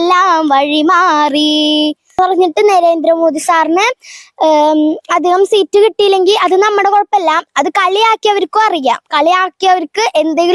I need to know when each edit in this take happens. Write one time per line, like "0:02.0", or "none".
0:02.2